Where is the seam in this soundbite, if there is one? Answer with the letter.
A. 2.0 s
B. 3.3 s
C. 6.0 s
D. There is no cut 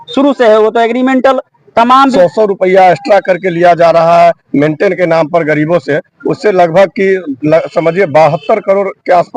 A